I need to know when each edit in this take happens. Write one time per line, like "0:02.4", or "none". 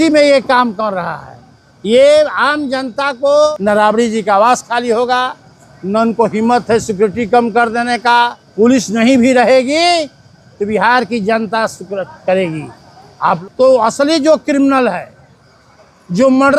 0:03.5
0:08.4
0:13.4